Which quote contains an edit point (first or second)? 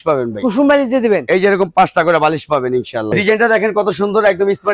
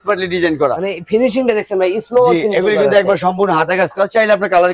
first